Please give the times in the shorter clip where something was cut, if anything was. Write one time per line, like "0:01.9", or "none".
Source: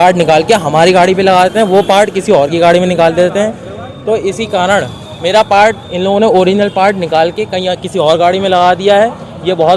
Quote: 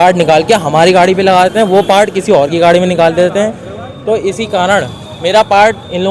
none